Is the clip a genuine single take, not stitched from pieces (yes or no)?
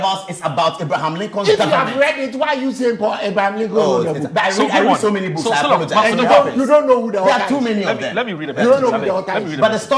yes